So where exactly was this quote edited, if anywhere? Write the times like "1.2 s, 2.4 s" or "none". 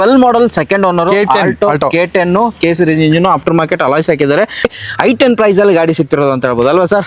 4.7 s